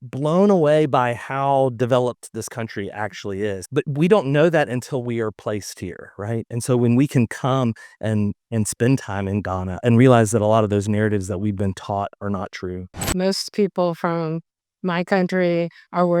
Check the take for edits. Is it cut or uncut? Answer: cut